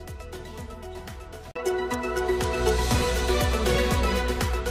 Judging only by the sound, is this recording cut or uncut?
cut